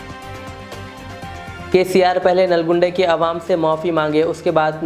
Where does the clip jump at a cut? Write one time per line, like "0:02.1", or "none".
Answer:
0:01.7